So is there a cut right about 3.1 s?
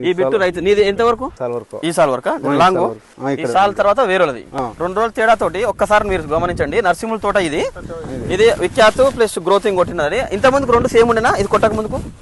yes; 2 cuts; at 3.1 s, 4.6 s

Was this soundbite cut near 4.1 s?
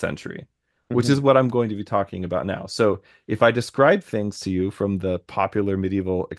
no; 0 cuts

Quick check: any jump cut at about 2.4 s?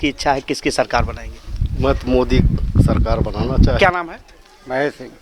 no; 1 cut; at 3.8 s

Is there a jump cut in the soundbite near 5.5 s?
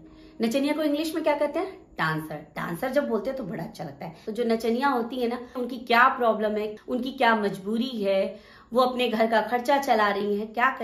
yes; 3 cuts; at 4.2 s, 5.5 s, 6.7 s

